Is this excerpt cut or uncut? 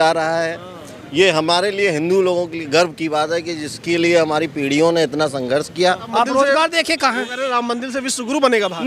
cut